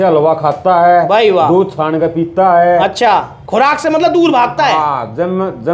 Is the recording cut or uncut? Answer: cut